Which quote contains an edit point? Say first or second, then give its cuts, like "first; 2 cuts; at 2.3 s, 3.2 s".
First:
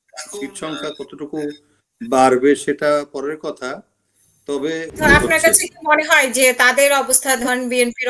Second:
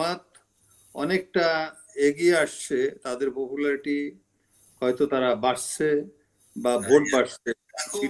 first; 1 cut; at 4.9 s